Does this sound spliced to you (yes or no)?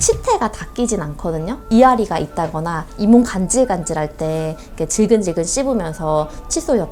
yes